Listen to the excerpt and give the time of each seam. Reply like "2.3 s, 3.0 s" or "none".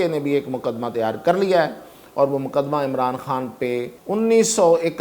4.0 s